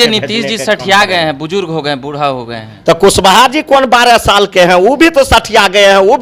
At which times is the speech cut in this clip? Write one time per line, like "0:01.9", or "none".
none